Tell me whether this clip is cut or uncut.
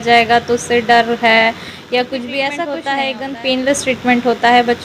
cut